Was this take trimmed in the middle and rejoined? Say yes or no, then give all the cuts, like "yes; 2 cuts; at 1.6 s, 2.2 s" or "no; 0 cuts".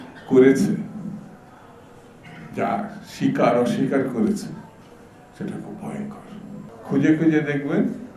yes; 1 cut; at 6.7 s